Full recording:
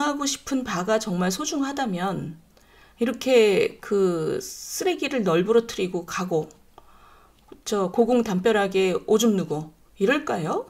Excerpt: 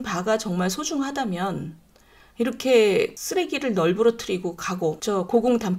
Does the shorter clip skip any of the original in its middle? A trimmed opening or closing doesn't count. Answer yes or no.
yes